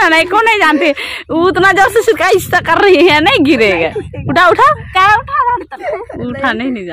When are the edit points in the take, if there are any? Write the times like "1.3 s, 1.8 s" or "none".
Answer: 5.9 s